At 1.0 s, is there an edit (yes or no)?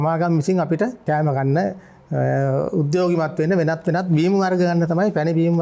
yes